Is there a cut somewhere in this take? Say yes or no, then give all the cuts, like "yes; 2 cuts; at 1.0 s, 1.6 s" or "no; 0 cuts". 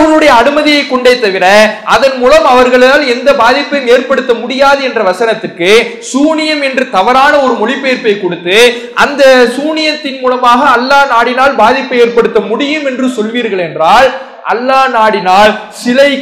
no; 0 cuts